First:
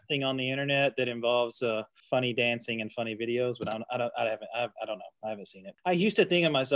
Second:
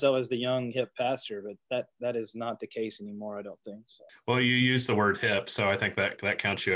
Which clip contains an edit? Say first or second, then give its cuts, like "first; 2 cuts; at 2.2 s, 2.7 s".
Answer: first; 1 cut; at 5.7 s